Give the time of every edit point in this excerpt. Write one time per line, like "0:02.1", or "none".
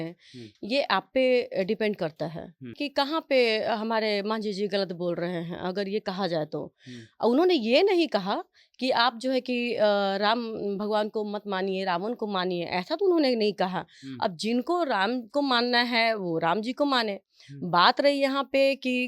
0:02.8